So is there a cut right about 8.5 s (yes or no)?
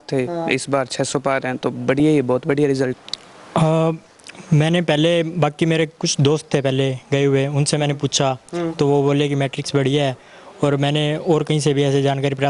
no